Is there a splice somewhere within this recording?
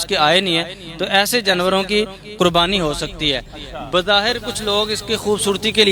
no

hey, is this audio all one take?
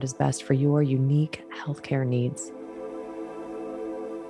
no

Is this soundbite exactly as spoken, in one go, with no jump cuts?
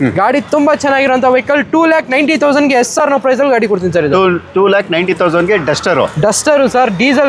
yes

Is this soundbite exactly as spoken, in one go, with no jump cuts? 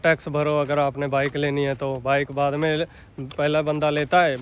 yes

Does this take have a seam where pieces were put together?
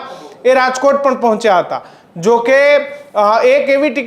no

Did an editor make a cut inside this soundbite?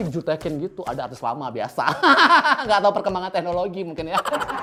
no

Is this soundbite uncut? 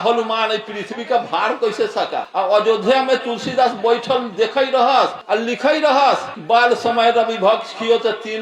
no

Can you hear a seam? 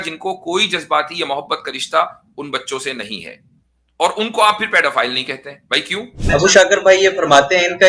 yes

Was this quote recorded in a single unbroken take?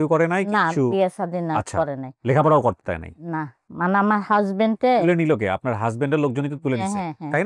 no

